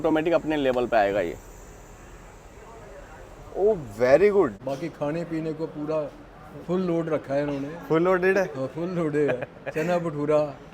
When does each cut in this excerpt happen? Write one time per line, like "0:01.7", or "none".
0:04.6